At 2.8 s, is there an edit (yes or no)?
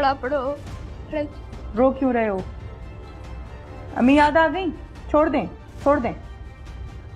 no